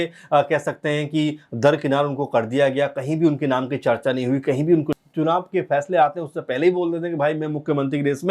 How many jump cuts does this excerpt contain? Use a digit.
1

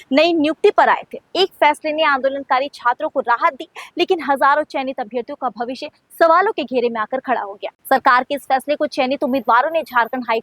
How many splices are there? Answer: 1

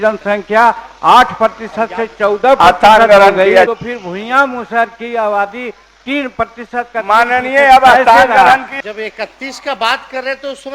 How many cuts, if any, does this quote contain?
2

